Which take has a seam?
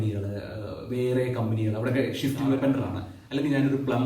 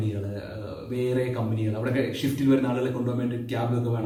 first; 1 cut; at 2.6 s

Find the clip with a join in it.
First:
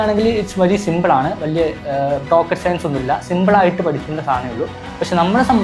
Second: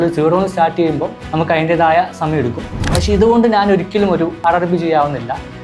second; 3 cuts; at 1.2 s, 2.7 s, 4.4 s

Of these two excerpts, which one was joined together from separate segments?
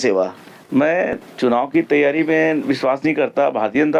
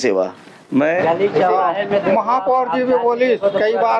second; 1 cut; at 1.0 s

